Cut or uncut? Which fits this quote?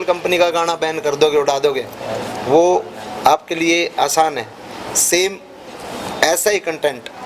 uncut